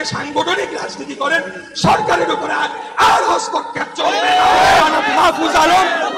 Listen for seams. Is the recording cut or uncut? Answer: cut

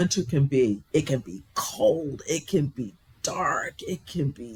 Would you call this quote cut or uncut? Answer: uncut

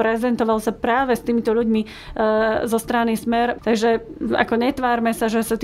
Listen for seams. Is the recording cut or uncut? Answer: cut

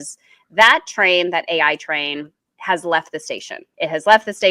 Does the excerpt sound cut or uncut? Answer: cut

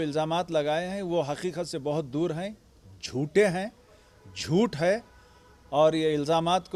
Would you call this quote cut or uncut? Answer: uncut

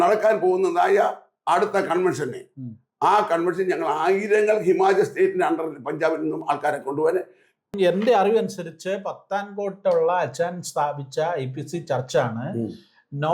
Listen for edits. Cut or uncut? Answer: cut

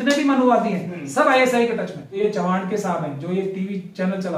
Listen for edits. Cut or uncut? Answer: cut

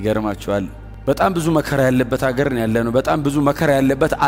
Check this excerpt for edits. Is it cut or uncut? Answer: uncut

